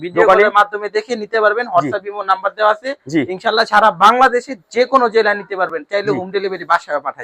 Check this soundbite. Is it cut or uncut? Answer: uncut